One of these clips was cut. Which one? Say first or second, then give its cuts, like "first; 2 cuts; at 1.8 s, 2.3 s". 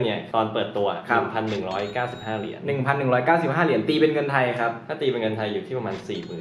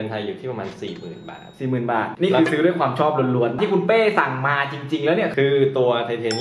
second; 3 cuts; at 2.1 s, 3.5 s, 5.3 s